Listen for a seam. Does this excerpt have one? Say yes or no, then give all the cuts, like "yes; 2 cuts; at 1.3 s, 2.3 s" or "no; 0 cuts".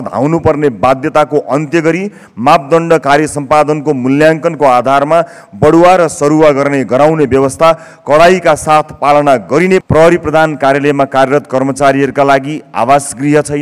yes; 1 cut; at 9.8 s